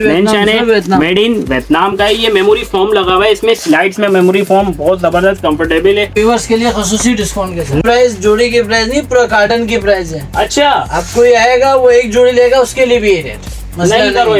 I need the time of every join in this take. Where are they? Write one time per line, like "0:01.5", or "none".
0:06.1
0:07.8